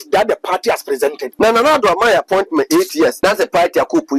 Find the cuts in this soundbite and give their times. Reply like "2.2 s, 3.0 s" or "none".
1.3 s, 3.2 s